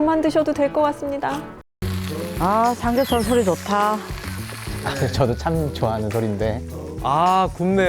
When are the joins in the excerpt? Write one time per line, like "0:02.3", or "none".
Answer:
0:01.9